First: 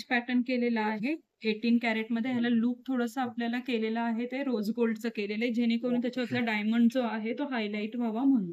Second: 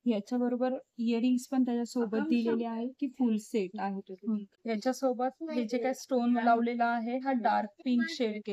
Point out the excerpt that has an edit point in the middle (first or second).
second